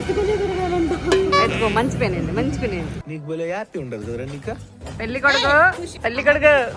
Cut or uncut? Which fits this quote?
cut